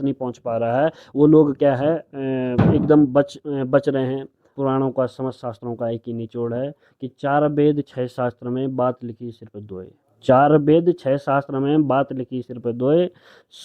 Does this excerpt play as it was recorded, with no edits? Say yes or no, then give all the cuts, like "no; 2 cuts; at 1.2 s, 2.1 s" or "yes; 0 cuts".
no; 1 cut; at 4.5 s